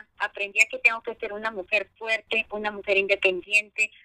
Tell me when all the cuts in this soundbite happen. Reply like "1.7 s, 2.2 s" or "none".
none